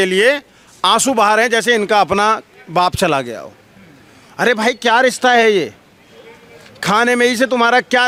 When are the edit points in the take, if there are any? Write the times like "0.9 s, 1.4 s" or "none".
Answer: none